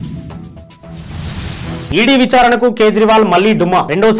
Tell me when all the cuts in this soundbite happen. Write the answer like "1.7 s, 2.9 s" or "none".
1.9 s

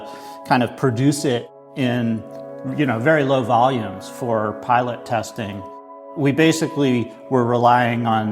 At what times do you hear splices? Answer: 1.6 s

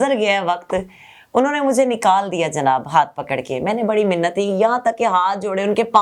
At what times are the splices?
none

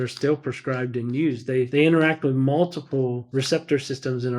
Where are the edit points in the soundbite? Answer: 1.7 s, 3.2 s

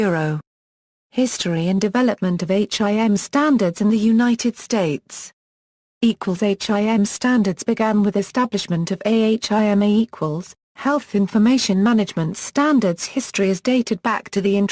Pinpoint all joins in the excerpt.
none

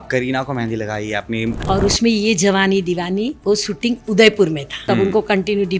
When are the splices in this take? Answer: 1.6 s, 4.7 s

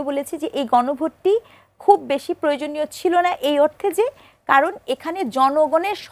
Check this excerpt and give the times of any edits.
none

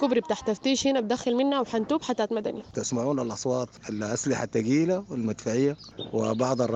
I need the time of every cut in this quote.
2.7 s

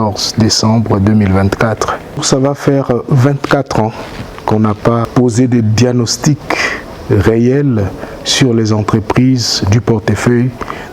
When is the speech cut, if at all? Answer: 2.2 s, 5.1 s

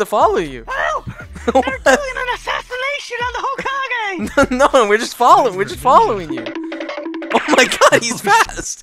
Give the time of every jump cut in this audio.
none

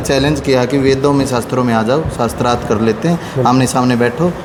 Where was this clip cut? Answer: none

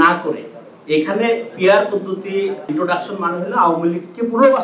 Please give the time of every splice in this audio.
2.7 s

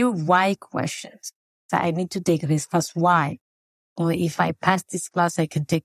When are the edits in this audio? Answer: 1.4 s, 3.9 s

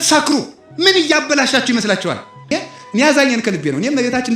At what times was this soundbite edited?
2.5 s

